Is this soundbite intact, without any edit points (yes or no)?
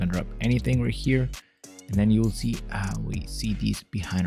yes